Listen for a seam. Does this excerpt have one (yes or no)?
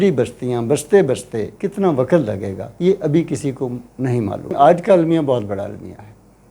yes